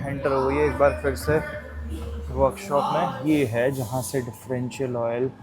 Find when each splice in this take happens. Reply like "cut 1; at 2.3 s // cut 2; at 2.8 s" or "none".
cut 1; at 3.2 s